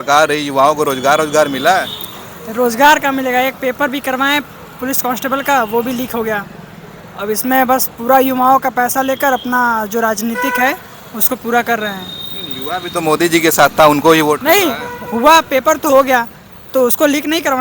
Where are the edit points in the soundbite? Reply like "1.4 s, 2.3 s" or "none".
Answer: none